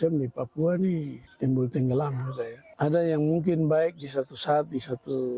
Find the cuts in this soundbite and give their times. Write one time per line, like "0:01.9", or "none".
0:01.2
0:02.6